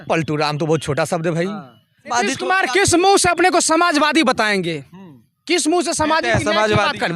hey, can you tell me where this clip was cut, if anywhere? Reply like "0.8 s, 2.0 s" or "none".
2.1 s